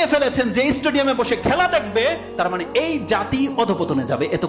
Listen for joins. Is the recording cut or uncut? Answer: uncut